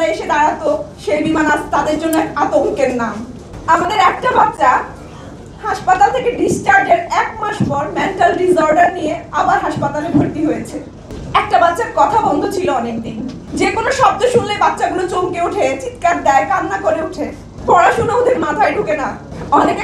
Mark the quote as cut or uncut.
uncut